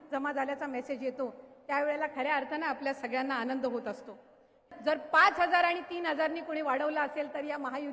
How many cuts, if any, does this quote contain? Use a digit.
1